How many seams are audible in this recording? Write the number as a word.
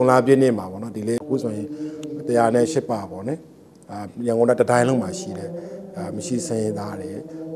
one